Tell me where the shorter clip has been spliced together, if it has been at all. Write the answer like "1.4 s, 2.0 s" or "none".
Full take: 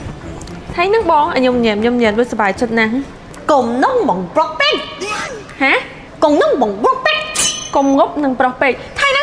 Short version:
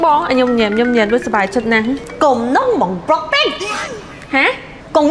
2.1 s